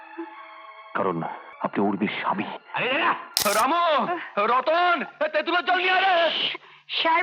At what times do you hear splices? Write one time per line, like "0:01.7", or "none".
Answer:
0:01.5
0:03.4